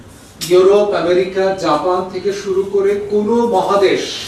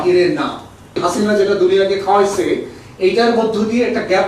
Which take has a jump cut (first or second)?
second